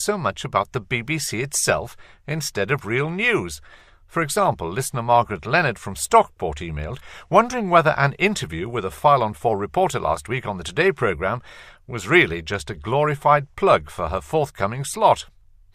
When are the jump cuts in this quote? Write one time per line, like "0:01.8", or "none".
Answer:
0:03.5